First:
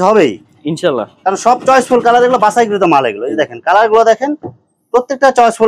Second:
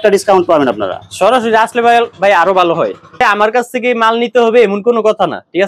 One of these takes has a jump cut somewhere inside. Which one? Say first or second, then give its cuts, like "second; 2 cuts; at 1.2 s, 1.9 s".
second; 1 cut; at 3.2 s